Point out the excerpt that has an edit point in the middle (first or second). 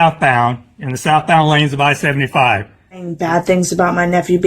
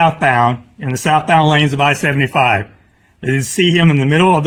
first